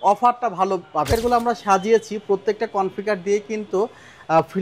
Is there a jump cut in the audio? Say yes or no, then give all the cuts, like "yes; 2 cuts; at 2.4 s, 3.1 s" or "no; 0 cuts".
yes; 1 cut; at 1.1 s